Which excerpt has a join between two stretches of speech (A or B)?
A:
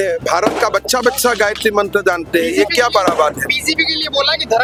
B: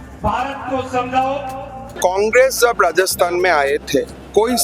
B